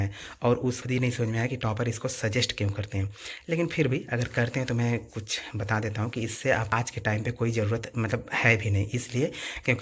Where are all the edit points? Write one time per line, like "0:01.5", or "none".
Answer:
0:00.8
0:06.7